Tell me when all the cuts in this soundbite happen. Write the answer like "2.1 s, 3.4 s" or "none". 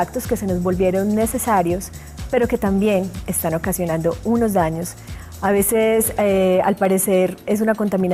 none